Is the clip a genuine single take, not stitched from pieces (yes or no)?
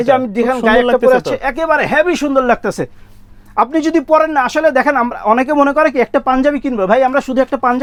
yes